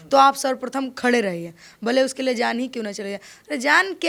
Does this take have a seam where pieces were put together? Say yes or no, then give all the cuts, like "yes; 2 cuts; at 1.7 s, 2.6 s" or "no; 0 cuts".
no; 0 cuts